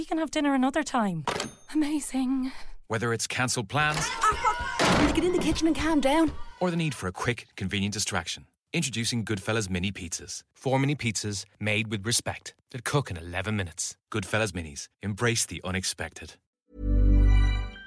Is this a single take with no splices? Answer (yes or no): no